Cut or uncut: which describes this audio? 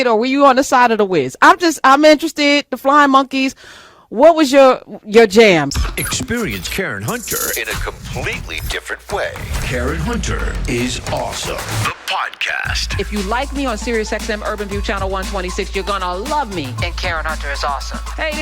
cut